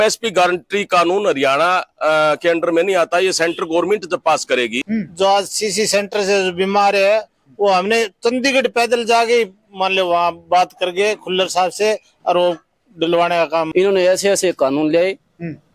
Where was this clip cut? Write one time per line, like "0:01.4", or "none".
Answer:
0:04.8
0:13.7